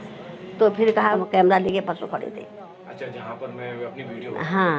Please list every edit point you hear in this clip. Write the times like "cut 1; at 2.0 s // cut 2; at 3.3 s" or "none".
cut 1; at 1.1 s

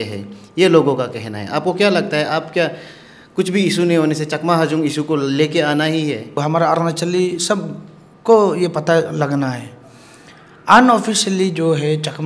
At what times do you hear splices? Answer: cut 1; at 6.4 s

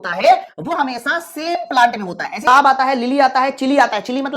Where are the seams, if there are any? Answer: cut 1; at 2.4 s

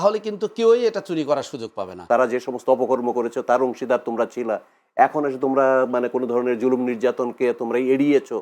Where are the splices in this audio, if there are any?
cut 1; at 2.0 s

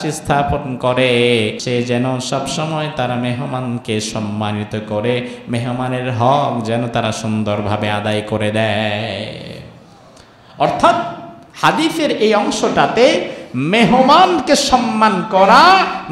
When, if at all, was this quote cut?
cut 1; at 1.6 s

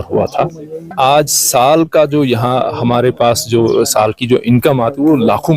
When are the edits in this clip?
cut 1; at 0.9 s

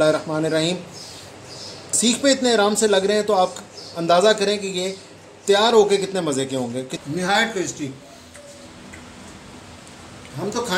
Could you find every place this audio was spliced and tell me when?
cut 1; at 2.0 s // cut 2; at 6.9 s

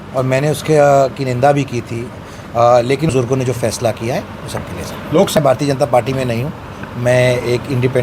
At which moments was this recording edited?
cut 1; at 3.1 s // cut 2; at 5.4 s

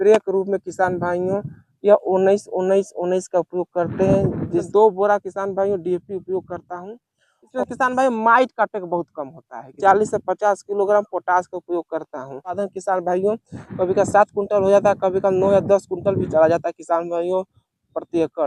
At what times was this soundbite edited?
cut 1; at 4.7 s // cut 2; at 7.3 s // cut 3; at 9.8 s // cut 4; at 12.6 s

